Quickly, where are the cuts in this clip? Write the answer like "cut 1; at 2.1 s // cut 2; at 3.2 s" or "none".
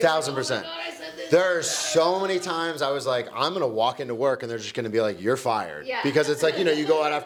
none